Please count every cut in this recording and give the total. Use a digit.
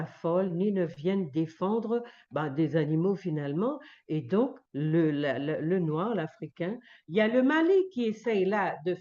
1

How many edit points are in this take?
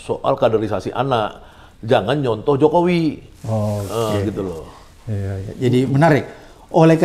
0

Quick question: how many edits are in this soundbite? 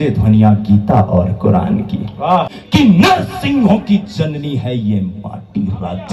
1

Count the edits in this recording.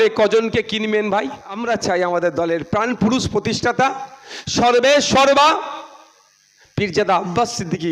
1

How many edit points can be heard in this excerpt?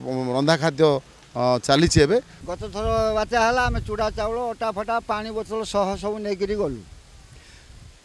1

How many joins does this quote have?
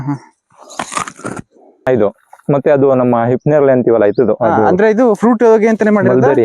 1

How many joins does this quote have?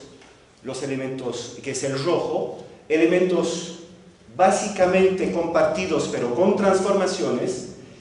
0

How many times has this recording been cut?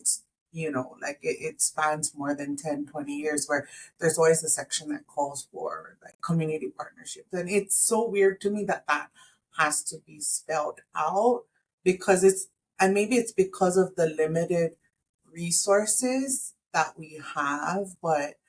1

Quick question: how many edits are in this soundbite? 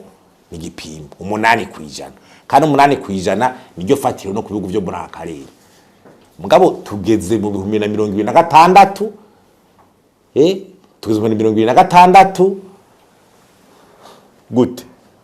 0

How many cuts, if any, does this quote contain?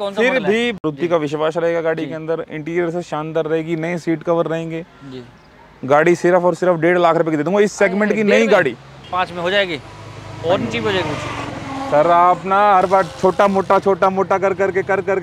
2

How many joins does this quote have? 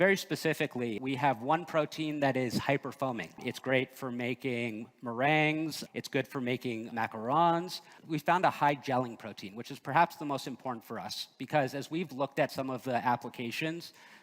5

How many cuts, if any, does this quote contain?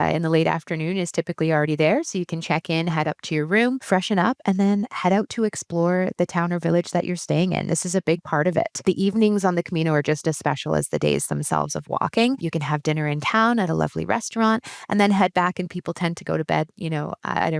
3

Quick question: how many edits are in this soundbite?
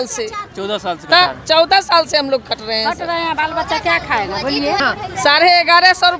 1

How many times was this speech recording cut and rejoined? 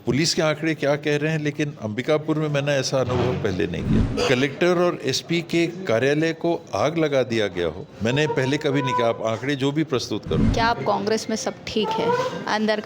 3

